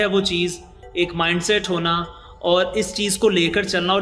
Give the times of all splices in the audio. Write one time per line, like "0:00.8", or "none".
none